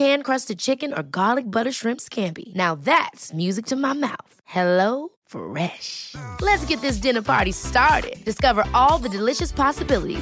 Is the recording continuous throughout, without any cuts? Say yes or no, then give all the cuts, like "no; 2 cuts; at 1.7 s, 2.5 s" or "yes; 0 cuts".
yes; 0 cuts